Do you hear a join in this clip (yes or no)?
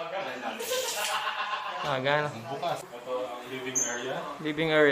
yes